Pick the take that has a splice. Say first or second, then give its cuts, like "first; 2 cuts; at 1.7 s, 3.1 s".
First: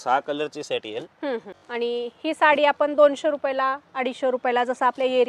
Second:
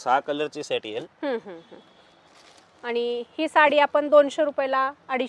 first; 1 cut; at 1.6 s